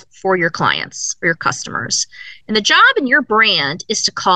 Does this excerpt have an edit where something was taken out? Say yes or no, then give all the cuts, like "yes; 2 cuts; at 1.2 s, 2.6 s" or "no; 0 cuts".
no; 0 cuts